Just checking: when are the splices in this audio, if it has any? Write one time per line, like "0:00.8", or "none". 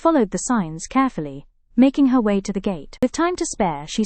0:03.0

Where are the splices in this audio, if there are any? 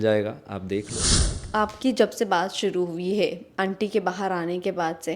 0:01.3

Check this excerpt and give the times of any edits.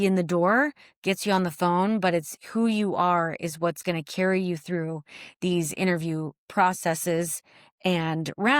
none

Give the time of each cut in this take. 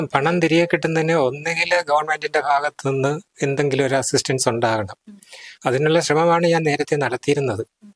none

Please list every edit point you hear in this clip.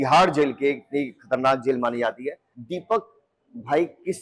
0:02.5

